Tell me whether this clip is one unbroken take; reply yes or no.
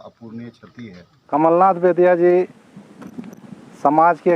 no